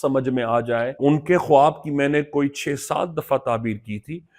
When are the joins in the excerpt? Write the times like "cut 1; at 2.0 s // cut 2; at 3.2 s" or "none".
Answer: cut 1; at 0.9 s